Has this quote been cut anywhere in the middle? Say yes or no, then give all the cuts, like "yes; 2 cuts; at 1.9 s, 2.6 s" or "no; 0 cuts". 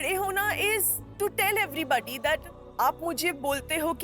yes; 1 cut; at 1.0 s